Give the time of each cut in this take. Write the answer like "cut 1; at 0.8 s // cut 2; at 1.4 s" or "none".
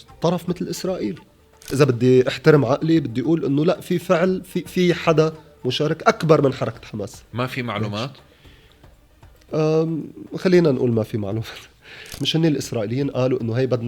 cut 1; at 1.6 s // cut 2; at 12.2 s